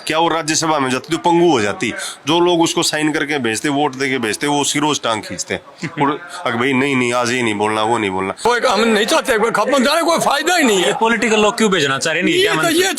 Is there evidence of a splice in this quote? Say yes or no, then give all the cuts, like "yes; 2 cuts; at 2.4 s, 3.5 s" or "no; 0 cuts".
yes; 1 cut; at 8.4 s